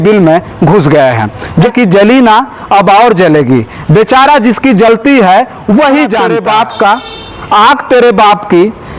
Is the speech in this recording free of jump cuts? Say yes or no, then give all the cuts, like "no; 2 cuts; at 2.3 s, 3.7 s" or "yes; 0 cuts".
no; 2 cuts; at 1.7 s, 6.3 s